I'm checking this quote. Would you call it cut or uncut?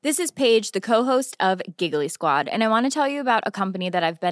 uncut